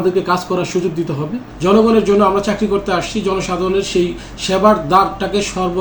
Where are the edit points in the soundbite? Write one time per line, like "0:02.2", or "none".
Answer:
0:01.4